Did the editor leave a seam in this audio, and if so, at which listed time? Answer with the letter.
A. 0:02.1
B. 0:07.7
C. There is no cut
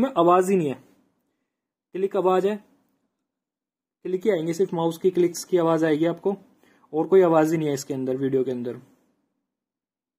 C